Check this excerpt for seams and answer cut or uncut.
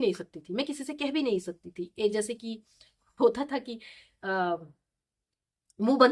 uncut